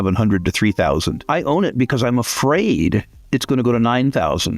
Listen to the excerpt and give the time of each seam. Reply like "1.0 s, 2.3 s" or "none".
1.2 s